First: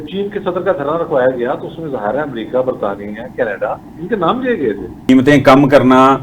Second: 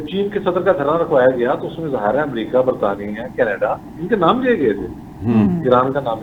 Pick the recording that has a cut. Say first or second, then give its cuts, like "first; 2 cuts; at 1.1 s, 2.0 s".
first; 1 cut; at 5.1 s